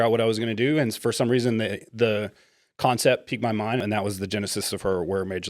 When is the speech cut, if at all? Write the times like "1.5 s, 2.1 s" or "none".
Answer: 3.8 s

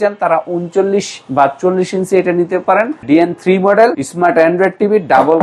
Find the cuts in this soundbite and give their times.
3.0 s, 4.0 s

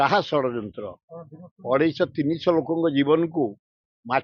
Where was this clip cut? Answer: none

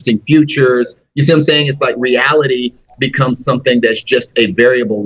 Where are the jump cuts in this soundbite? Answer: none

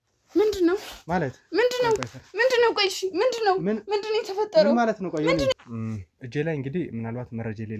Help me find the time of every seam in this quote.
5.5 s

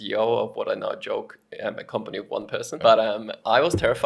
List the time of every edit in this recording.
2.7 s

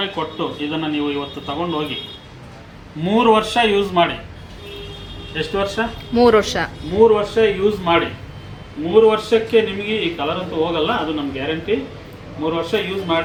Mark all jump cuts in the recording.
none

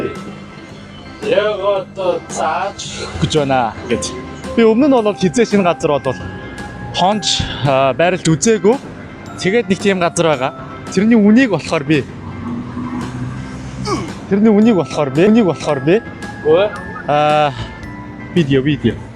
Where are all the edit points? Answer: none

